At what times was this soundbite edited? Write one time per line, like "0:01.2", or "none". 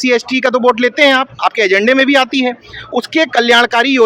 none